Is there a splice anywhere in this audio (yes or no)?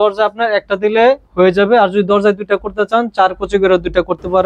no